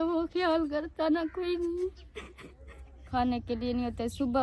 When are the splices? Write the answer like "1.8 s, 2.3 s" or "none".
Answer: 3.1 s